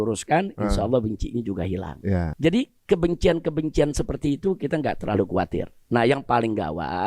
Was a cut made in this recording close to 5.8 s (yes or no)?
no